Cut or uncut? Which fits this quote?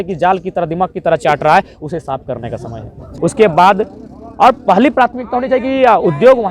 cut